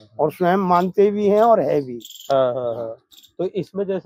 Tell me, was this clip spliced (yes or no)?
no